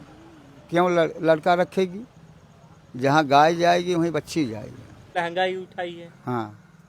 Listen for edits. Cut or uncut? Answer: cut